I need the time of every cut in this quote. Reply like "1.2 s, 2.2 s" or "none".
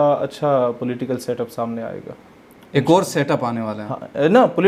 none